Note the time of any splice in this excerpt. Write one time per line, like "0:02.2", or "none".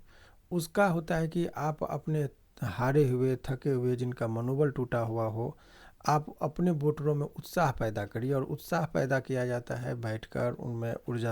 none

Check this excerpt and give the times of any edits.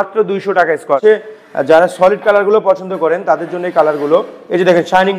0:01.0

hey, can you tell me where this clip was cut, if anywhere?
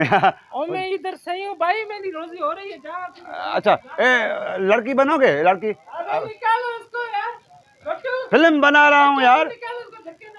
none

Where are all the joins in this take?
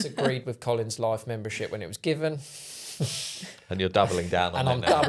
none

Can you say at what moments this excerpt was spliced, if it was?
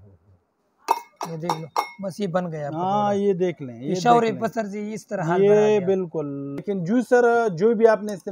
0:06.6

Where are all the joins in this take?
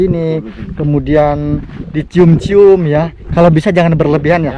0:03.2

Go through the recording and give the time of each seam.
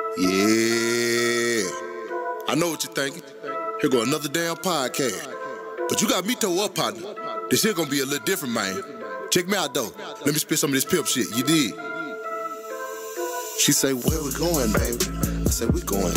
0:02.2

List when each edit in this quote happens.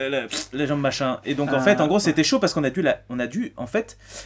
none

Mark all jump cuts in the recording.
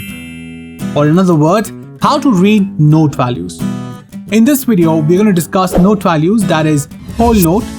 none

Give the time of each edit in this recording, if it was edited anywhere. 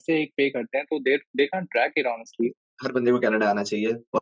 none

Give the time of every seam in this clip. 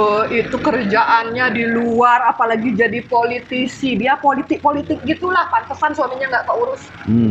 none

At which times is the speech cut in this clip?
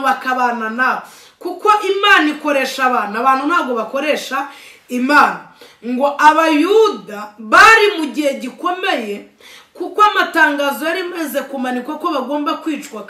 none

